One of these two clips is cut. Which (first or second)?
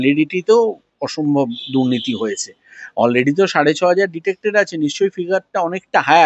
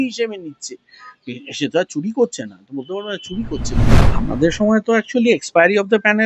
second